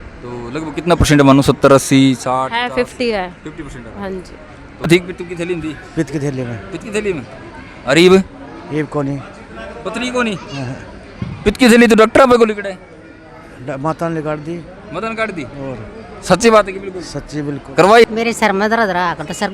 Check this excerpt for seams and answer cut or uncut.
cut